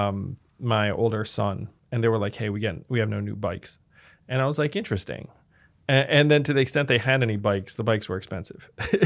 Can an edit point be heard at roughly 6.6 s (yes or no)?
no